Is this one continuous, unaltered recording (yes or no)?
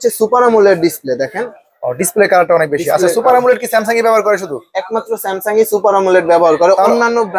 yes